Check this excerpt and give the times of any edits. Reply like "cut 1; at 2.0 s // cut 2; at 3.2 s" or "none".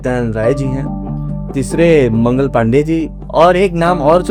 none